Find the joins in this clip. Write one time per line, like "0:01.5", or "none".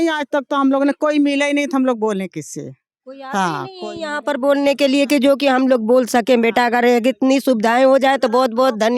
none